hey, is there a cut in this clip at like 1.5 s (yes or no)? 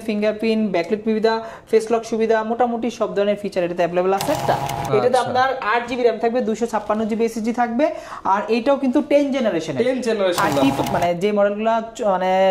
no